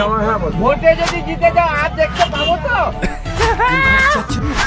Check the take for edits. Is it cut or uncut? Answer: uncut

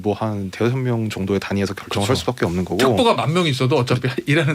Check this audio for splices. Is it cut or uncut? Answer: uncut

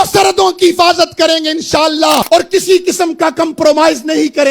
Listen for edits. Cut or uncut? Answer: cut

